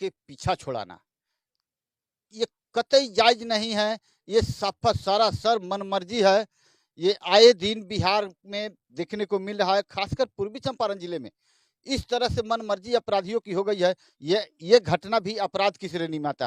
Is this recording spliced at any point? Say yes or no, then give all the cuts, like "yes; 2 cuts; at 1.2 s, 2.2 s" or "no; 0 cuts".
no; 0 cuts